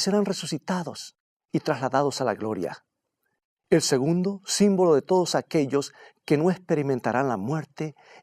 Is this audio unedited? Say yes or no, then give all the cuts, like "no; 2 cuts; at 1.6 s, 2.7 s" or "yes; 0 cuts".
no; 1 cut; at 6.0 s